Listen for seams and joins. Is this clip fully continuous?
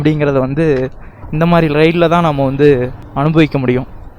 no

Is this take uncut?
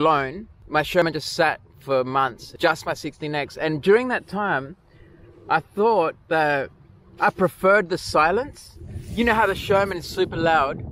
no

